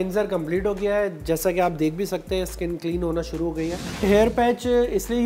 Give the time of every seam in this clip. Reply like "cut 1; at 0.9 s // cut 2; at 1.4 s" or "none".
cut 1; at 4.0 s